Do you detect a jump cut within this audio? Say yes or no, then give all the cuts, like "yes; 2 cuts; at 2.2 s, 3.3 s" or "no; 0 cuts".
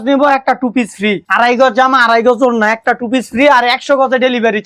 no; 0 cuts